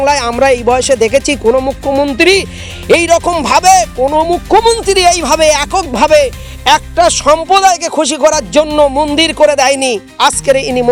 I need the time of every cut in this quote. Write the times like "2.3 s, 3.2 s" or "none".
none